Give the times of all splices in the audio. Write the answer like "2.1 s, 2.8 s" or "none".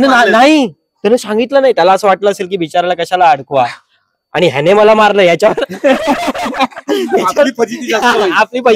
none